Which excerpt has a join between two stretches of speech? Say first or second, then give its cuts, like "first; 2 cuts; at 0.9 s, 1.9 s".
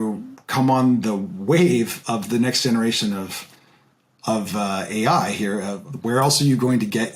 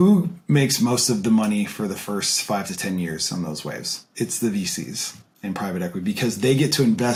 first; 1 cut; at 5.8 s